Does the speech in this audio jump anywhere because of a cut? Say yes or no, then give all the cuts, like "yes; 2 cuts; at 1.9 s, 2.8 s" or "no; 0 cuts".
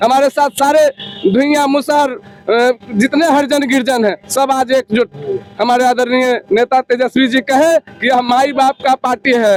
no; 0 cuts